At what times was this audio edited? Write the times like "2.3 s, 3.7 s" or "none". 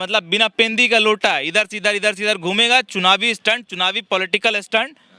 none